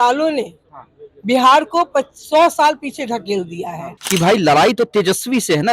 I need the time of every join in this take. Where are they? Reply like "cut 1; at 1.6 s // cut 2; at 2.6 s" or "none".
cut 1; at 3.9 s

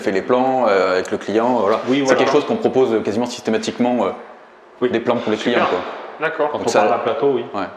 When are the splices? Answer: none

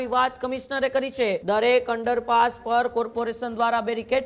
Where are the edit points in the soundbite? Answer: cut 1; at 1.4 s

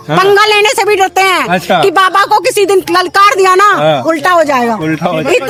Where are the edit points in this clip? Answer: none

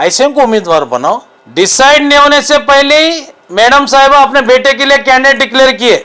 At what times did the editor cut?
cut 1; at 1.3 s

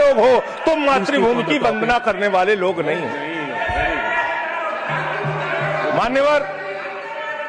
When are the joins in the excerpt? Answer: none

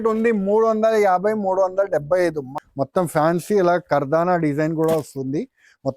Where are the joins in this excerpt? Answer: cut 1; at 2.5 s

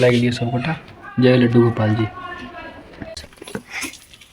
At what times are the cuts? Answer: cut 1; at 3.2 s

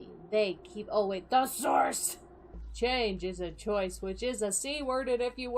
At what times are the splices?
cut 1; at 2.6 s

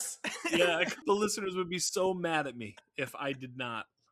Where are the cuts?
cut 1; at 1.0 s

